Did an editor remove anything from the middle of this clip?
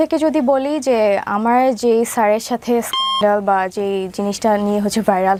no; 0 cuts

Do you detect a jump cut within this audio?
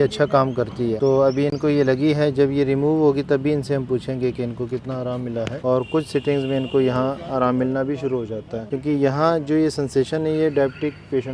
no; 0 cuts

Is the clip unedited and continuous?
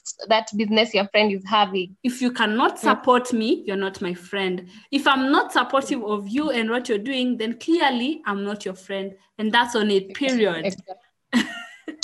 no; 1 cut; at 1.9 s

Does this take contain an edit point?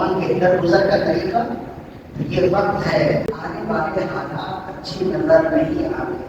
yes; 1 cut; at 3.2 s

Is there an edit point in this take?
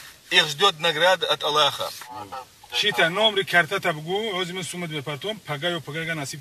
yes; 1 cut; at 2.3 s

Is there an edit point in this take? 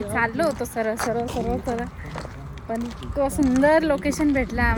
no; 0 cuts

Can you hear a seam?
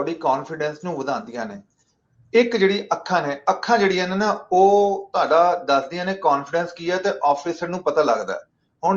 no; 0 cuts

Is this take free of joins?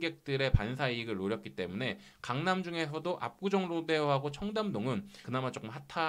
yes; 0 cuts

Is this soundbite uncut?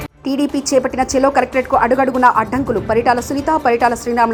yes; 0 cuts

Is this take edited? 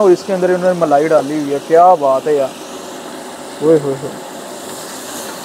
no; 0 cuts

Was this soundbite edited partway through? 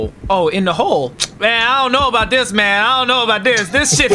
yes; 1 cut; at 1.2 s

